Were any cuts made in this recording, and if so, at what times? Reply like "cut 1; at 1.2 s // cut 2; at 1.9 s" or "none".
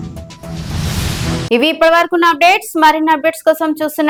none